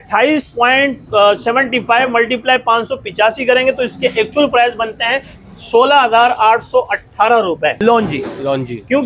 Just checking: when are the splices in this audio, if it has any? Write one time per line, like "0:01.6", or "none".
0:07.8